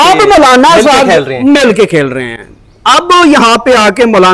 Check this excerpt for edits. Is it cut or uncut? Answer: uncut